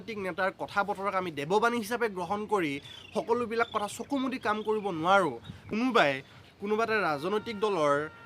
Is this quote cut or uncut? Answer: cut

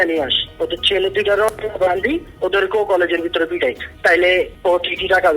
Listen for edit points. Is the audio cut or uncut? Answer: cut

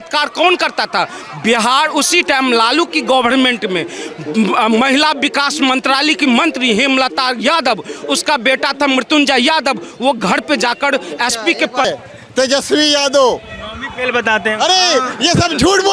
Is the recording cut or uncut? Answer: cut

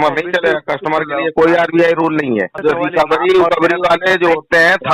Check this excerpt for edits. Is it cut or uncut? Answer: cut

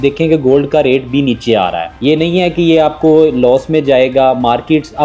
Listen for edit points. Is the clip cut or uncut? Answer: cut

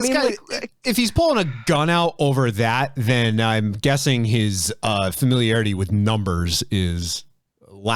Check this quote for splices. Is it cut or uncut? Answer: uncut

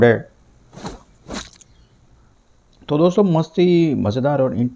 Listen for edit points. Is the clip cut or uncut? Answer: uncut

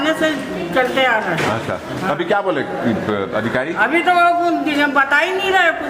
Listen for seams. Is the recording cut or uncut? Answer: uncut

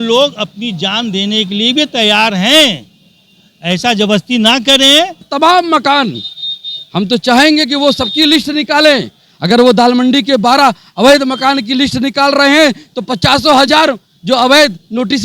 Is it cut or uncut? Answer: cut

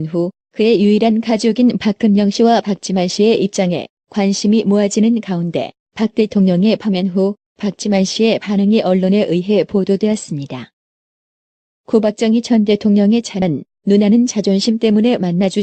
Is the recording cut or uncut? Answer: uncut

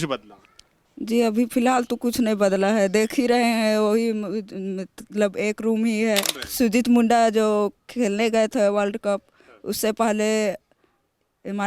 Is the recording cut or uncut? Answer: cut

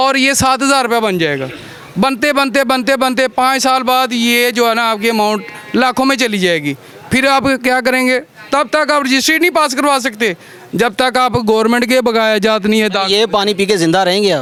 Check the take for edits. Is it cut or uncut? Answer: uncut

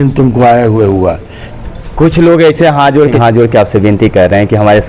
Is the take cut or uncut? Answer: cut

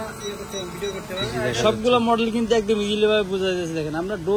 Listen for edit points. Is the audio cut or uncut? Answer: cut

